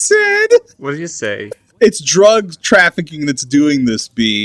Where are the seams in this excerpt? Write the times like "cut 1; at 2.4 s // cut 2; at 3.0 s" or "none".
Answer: cut 1; at 1.6 s